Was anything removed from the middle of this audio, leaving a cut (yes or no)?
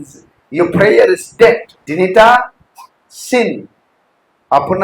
yes